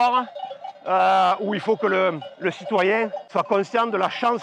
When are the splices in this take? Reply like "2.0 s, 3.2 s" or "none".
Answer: 3.2 s